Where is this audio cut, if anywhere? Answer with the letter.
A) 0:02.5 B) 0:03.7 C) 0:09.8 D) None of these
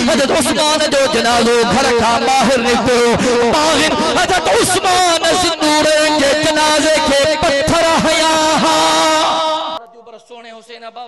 C